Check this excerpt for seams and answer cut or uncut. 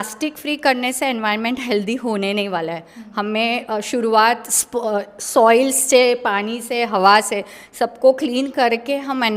uncut